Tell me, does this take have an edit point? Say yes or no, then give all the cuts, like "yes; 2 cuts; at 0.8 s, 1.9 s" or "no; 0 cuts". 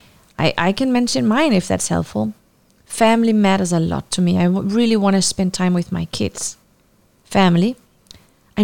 no; 0 cuts